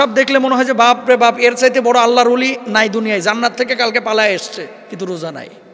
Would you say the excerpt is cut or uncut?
cut